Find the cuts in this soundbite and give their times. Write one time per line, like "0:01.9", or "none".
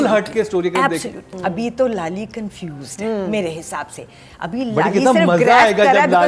0:01.3